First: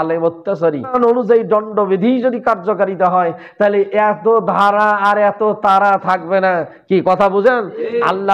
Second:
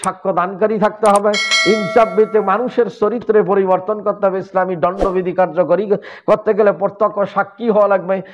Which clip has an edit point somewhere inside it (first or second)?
first